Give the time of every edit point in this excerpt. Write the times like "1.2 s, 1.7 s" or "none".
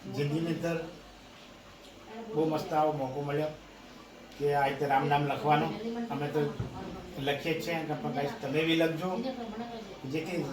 none